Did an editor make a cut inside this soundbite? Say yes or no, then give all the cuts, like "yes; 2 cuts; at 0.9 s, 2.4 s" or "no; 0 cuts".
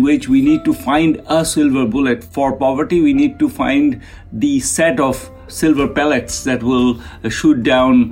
yes; 2 cuts; at 2.3 s, 5.5 s